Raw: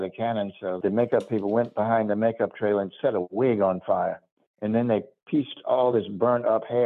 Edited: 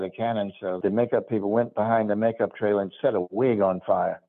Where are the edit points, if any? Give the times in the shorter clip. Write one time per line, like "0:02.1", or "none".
none